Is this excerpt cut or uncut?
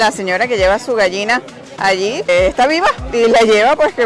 uncut